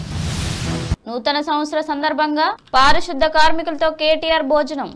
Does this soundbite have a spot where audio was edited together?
yes; 1 cut; at 0.9 s

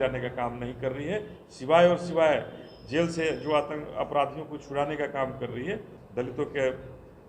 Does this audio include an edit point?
yes; 1 cut; at 5.9 s

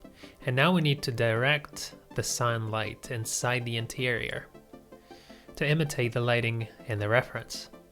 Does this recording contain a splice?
no; 0 cuts

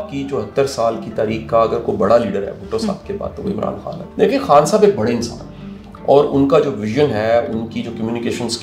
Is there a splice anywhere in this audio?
yes; 1 cut; at 4.1 s

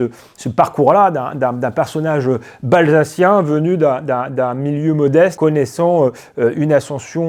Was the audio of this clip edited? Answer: no; 0 cuts

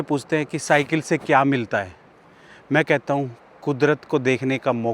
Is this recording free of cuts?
yes; 0 cuts

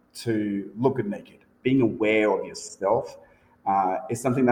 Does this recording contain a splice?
yes; 1 cut; at 1.6 s

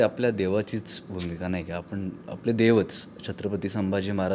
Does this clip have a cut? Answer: no; 0 cuts

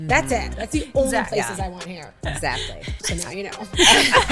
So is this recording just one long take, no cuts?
no; 1 cut; at 3.0 s

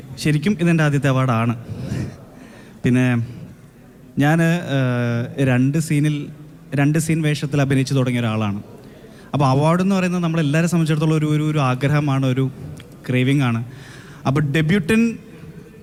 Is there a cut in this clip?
no; 0 cuts

